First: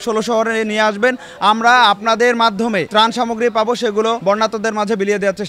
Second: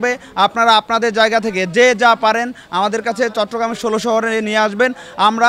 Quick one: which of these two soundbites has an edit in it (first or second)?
first